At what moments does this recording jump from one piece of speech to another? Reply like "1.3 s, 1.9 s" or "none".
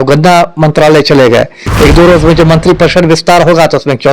1.6 s